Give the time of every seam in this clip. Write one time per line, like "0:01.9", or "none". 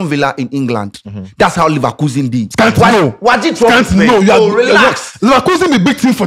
none